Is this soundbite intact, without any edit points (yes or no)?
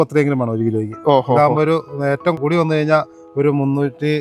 no